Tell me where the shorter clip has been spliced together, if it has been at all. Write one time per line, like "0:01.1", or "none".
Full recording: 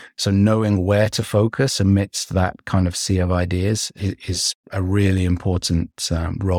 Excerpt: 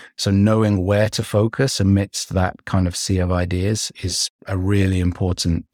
0:03.9